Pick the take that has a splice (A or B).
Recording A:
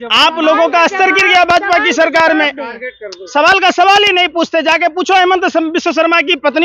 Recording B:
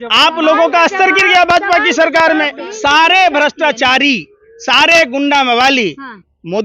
B